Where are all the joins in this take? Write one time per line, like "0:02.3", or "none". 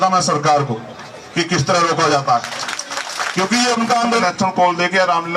0:04.2